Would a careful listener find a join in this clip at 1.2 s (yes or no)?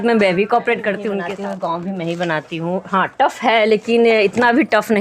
yes